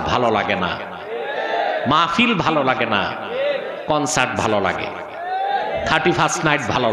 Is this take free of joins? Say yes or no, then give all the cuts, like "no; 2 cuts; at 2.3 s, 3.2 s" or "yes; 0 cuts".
yes; 0 cuts